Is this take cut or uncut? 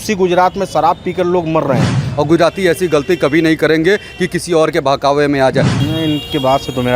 cut